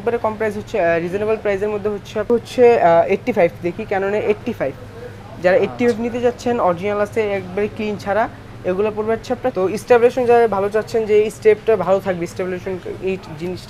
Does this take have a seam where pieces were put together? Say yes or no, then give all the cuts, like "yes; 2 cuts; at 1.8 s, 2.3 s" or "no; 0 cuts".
yes; 2 cuts; at 2.3 s, 9.5 s